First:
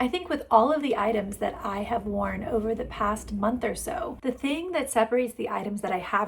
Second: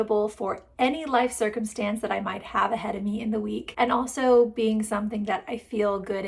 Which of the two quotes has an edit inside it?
second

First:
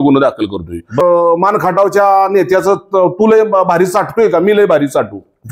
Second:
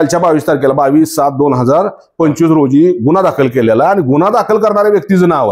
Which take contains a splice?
first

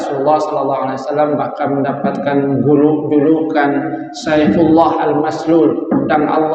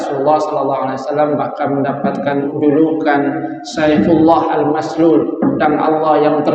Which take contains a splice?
second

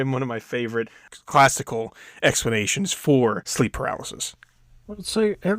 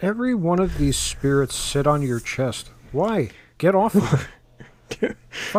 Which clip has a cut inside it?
first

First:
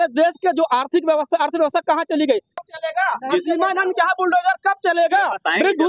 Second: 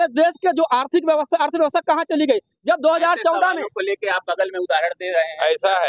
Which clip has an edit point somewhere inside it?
first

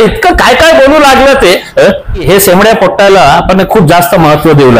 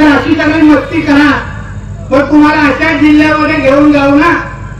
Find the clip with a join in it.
first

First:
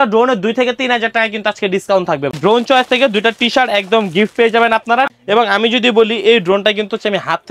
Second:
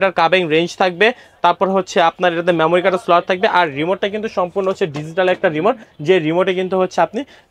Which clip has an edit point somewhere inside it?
first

